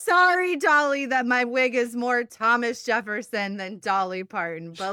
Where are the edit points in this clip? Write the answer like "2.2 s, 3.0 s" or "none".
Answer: none